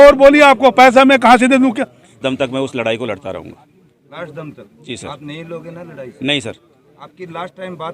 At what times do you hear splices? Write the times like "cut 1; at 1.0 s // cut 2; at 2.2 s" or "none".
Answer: cut 1; at 2.1 s